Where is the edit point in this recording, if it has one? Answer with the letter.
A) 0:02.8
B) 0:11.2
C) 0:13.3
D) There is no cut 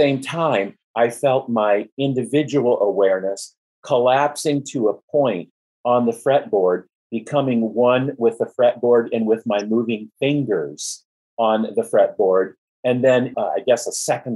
C